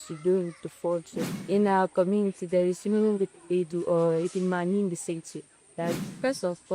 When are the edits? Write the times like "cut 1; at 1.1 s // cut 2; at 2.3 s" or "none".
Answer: cut 1; at 1.4 s // cut 2; at 6.0 s